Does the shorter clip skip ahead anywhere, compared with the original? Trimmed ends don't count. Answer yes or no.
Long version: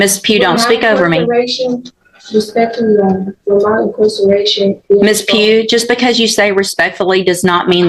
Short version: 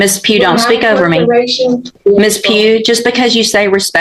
yes